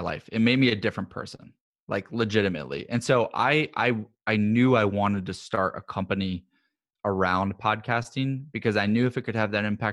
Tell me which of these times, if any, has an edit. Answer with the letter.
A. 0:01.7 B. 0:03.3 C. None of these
C